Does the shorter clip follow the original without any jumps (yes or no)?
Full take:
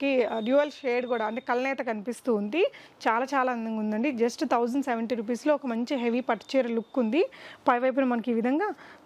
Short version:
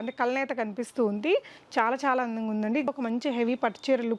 no